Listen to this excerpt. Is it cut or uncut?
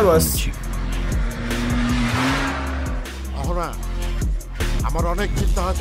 uncut